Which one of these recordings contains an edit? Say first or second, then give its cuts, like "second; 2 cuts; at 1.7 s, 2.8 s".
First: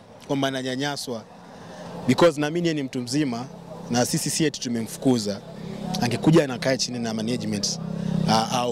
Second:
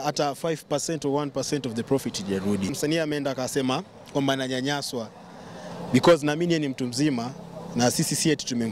second; 1 cut; at 2.7 s